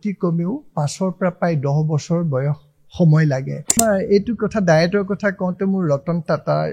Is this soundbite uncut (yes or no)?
no